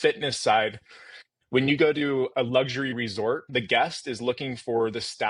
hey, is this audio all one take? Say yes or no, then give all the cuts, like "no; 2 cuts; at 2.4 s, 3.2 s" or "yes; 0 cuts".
no; 2 cuts; at 2.3 s, 3.4 s